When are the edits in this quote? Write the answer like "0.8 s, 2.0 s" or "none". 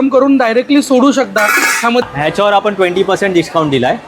2.0 s